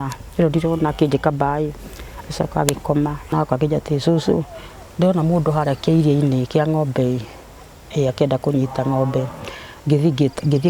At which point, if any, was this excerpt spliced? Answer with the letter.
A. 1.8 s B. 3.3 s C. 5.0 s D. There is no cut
B